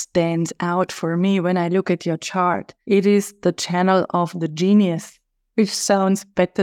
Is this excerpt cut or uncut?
cut